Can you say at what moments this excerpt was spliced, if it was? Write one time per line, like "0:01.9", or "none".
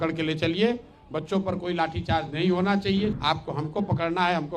0:03.2